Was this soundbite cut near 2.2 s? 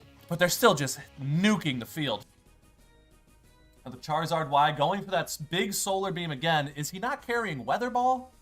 yes; 1 cut; at 2.2 s

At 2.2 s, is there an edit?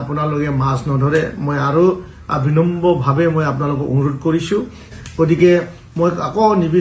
no; 1 cut; at 5.0 s

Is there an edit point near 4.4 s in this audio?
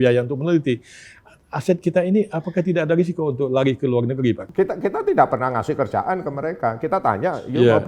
yes; 1 cut; at 4.4 s

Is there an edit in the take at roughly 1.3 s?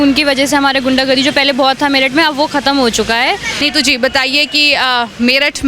no; 1 cut; at 3.5 s

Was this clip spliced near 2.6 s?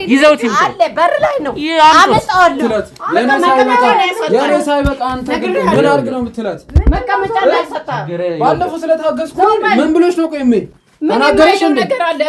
yes; 1 cut; at 2.6 s

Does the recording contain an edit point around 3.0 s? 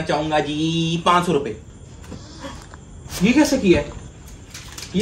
yes; 1 cut; at 3.0 s

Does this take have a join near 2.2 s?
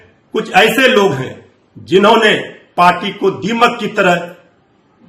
no; 0 cuts

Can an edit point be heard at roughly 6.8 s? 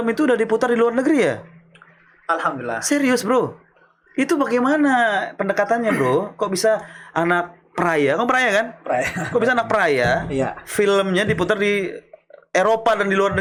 no; 0 cuts

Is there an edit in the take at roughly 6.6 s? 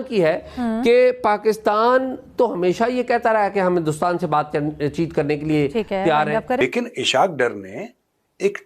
yes; 1 cut; at 6.6 s

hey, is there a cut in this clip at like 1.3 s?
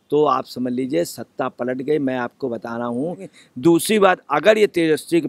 no; 1 cut; at 3.3 s

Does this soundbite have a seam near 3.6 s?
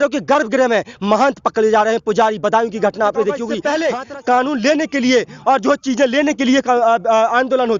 yes; 1 cut; at 3.6 s

